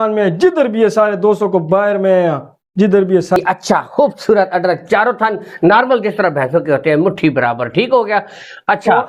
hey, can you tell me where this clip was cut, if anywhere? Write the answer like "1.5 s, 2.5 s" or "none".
3.4 s